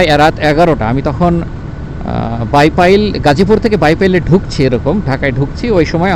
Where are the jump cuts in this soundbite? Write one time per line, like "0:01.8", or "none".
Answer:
none